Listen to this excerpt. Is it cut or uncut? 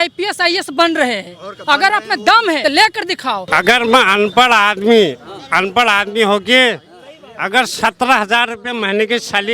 cut